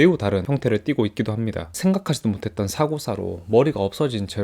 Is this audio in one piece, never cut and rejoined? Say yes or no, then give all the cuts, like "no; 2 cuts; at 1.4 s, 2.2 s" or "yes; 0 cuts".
no; 1 cut; at 1.7 s